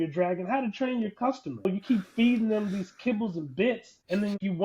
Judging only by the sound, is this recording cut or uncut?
cut